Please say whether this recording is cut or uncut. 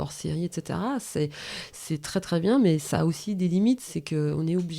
uncut